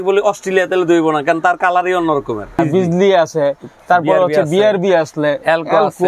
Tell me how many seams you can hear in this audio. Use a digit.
1